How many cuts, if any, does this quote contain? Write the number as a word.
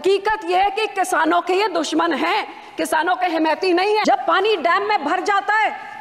one